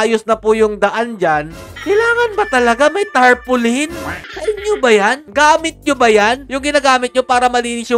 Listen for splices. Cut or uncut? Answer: uncut